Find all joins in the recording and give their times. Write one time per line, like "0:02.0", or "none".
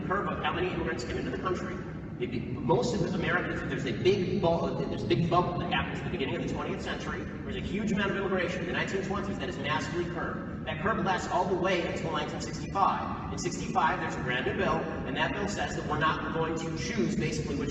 0:08.6